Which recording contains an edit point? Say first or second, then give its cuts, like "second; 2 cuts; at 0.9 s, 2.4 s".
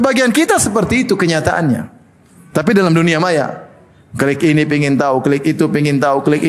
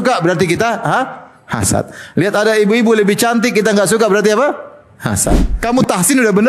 second; 1 cut; at 5.5 s